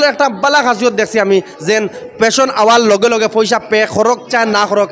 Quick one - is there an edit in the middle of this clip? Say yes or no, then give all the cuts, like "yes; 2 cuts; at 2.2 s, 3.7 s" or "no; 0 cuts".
no; 0 cuts